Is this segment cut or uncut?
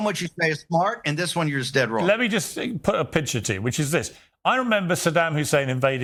uncut